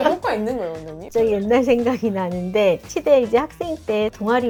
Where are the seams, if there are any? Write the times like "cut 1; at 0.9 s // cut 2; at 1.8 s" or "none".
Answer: none